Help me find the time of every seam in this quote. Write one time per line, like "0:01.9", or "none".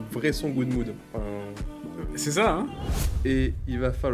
0:02.9